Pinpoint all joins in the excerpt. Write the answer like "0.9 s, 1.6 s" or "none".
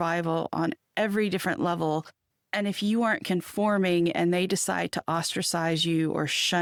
none

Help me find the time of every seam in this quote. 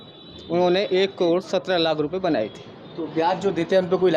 none

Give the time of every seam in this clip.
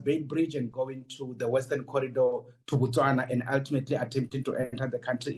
none

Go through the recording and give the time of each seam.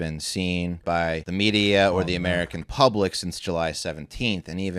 1.1 s

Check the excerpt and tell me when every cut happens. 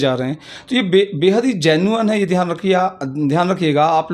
none

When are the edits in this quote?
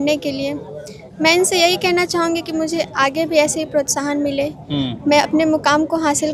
none

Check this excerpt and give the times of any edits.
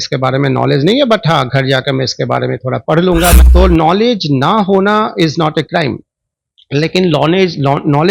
3.4 s

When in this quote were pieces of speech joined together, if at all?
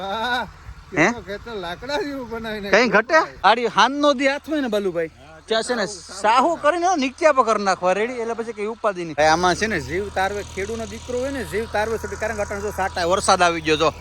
3.3 s, 9.1 s

